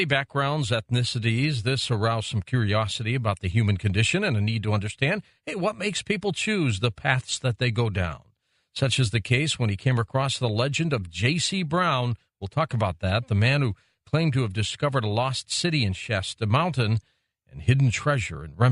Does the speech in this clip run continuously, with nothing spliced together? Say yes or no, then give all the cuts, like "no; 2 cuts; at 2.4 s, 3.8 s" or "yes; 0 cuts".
no; 1 cut; at 7.0 s